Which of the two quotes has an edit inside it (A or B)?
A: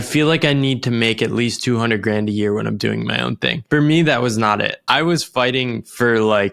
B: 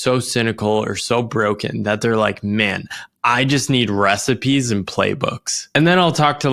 A